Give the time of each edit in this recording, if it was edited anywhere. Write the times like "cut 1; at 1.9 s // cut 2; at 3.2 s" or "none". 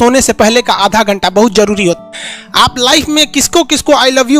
cut 1; at 2.0 s